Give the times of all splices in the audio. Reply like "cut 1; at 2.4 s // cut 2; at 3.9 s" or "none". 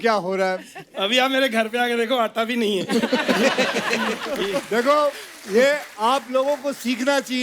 cut 1; at 4.4 s